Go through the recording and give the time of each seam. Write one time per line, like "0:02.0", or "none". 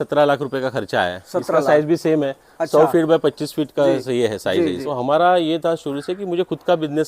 0:04.8